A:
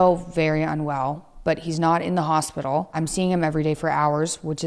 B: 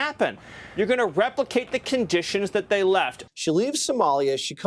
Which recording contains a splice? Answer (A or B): B